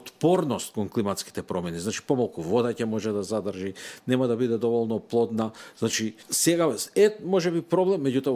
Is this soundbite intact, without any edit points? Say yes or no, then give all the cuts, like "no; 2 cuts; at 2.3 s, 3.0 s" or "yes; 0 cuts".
no; 1 cut; at 6.3 s